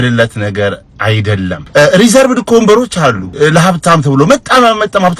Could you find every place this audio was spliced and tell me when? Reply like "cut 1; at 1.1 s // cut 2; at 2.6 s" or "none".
cut 1; at 1.6 s // cut 2; at 3.2 s